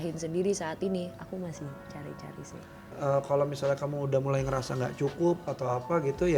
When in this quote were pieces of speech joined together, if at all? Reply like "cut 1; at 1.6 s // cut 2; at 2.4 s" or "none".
cut 1; at 2.9 s